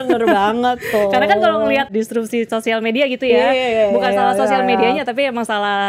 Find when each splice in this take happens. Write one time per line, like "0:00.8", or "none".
0:01.9